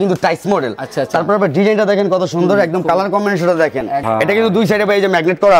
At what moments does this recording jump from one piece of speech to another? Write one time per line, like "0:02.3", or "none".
0:04.0